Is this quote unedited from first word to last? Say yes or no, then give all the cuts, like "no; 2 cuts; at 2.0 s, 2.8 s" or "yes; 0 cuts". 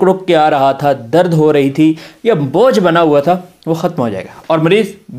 yes; 0 cuts